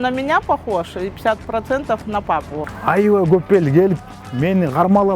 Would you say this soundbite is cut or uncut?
cut